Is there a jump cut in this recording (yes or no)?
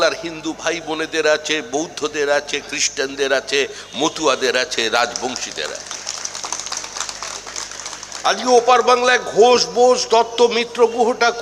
no